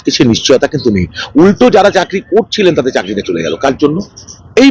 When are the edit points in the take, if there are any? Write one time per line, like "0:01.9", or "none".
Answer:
none